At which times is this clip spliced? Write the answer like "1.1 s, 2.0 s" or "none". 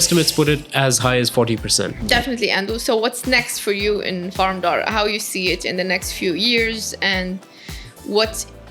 2.0 s